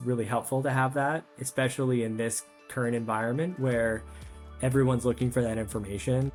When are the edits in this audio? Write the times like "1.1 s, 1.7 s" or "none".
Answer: none